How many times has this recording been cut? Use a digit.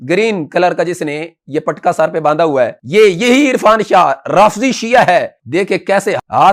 0